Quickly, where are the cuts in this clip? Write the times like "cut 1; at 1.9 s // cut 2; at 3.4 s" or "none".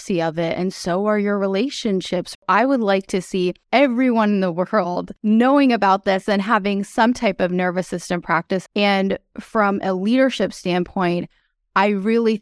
cut 1; at 2.4 s // cut 2; at 3.6 s // cut 3; at 5.2 s // cut 4; at 8.6 s